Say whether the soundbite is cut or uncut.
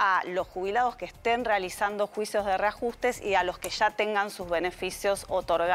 uncut